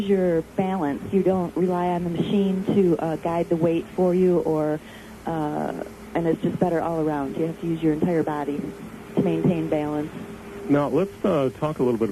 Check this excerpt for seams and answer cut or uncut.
cut